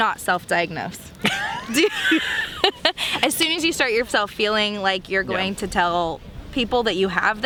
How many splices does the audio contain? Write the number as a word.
zero